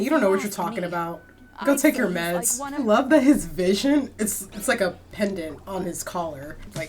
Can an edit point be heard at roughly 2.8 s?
yes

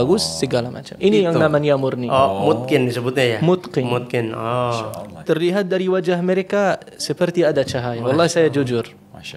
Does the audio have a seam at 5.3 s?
no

